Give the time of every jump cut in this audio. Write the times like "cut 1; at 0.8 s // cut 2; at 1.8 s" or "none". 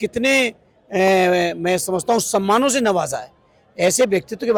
none

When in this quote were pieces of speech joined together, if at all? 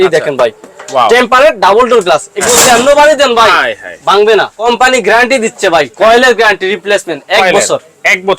cut 1; at 4.6 s

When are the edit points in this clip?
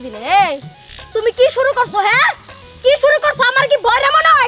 none

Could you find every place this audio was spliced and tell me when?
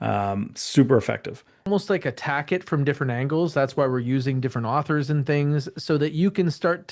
cut 1; at 1.7 s

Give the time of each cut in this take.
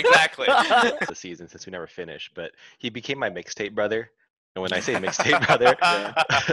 cut 1; at 1.1 s

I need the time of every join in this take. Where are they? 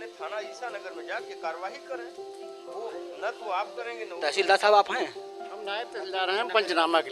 none

